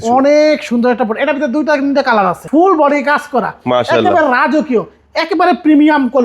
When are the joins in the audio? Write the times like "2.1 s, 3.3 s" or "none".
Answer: 2.4 s

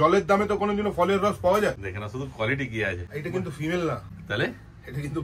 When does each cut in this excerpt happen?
1.8 s, 3.1 s, 4.1 s

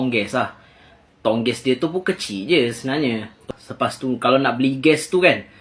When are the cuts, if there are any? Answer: 3.5 s

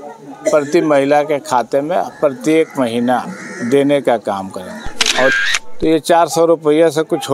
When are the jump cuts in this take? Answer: 5.3 s

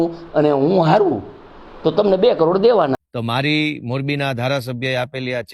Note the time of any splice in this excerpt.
3.0 s

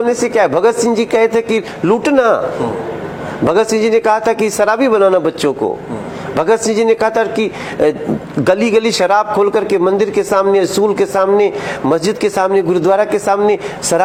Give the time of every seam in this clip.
none

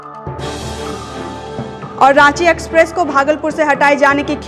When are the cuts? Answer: 1.8 s

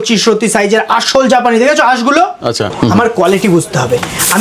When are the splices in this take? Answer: 2.7 s

